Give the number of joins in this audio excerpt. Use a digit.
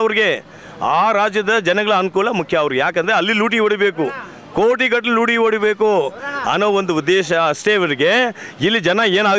0